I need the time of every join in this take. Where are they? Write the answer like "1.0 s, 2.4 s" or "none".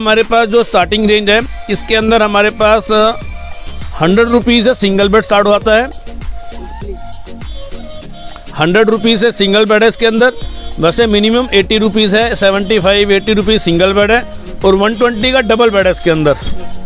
none